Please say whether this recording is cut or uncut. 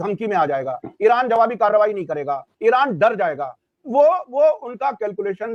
uncut